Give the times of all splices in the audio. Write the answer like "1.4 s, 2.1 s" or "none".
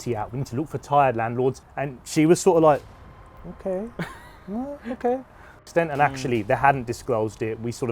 1.7 s, 5.6 s